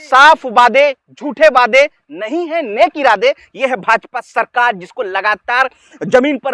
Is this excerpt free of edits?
yes; 0 cuts

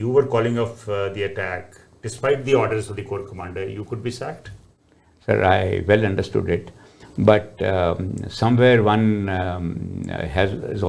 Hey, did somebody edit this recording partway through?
no; 0 cuts

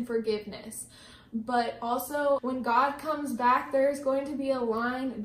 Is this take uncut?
no; 1 cut; at 2.4 s

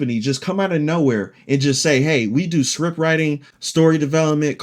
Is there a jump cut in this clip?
no; 0 cuts

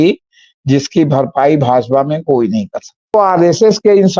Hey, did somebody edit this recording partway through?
yes; 1 cut; at 3.1 s

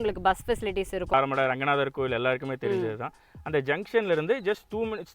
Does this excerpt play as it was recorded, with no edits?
no; 1 cut; at 1.1 s

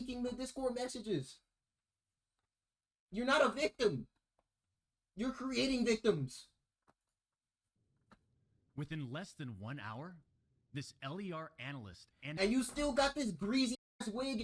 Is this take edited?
no; 0 cuts

